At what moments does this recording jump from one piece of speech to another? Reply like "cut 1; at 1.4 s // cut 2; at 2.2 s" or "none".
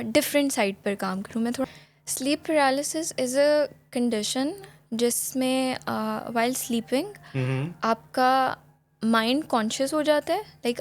cut 1; at 1.6 s